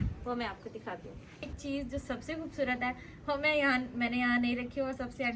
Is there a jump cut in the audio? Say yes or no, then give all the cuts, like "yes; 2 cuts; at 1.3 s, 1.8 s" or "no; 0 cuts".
yes; 1 cut; at 1.6 s